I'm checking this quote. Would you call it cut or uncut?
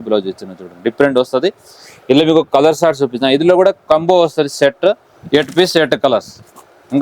cut